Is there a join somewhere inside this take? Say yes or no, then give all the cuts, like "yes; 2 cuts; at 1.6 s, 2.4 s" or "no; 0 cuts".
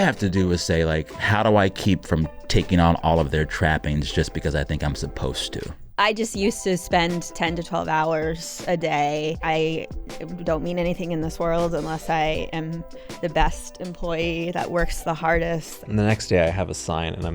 yes; 4 cuts; at 1.3 s, 5.8 s, 9.4 s, 15.7 s